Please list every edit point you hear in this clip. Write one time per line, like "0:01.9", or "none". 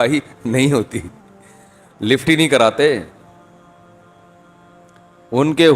0:03.1
0:04.6